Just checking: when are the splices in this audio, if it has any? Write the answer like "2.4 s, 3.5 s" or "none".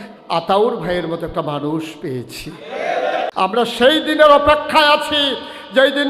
3.3 s